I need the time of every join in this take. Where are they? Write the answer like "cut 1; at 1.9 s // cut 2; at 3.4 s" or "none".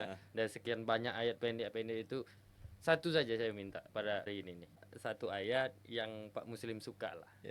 cut 1; at 4.3 s